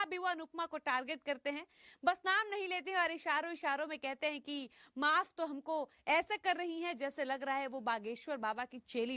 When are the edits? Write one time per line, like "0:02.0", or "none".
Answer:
none